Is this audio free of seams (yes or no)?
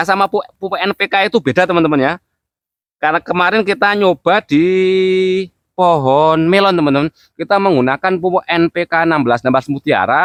yes